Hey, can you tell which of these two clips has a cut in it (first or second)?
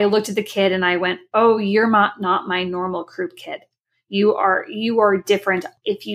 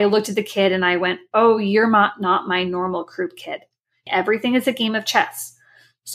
second